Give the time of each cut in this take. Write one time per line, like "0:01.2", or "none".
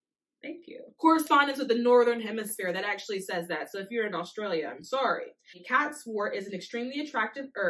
0:01.2
0:05.6